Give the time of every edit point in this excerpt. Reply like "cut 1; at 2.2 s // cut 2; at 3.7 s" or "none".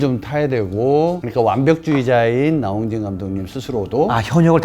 cut 1; at 1.2 s

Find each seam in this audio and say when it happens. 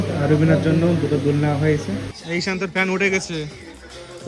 cut 1; at 2.1 s

